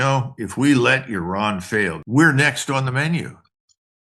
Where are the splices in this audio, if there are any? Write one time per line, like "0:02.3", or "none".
0:02.0